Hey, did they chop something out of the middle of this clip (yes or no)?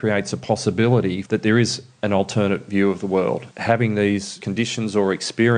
yes